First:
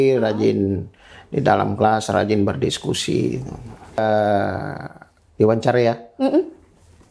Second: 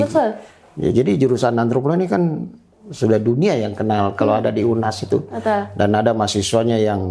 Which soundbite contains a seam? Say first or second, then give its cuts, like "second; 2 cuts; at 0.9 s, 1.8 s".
first; 1 cut; at 4.0 s